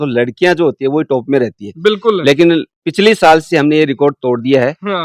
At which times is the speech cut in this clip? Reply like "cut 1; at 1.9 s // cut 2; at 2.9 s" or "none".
none